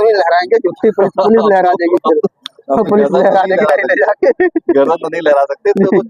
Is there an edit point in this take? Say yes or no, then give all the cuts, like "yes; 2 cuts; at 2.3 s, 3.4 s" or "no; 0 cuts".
no; 0 cuts